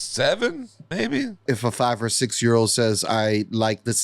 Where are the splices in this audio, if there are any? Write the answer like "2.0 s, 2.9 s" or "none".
1.4 s